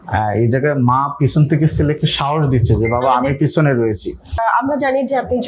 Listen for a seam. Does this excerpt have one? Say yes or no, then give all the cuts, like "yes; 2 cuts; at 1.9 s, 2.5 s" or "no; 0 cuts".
yes; 1 cut; at 4.4 s